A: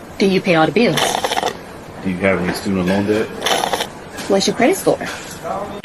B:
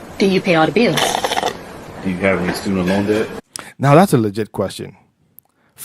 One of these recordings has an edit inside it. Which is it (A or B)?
A